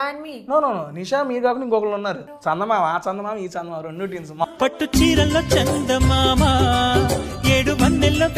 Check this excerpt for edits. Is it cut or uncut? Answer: cut